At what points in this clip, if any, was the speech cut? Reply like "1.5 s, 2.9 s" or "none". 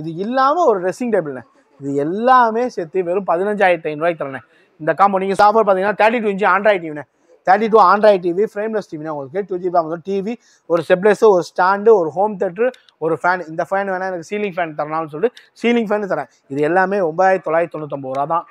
5.3 s